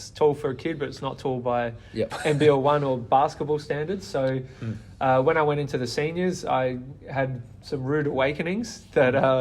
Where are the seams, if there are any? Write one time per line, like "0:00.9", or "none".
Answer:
none